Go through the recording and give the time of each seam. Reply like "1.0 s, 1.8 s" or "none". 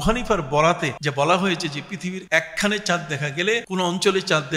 1.0 s, 2.2 s, 3.7 s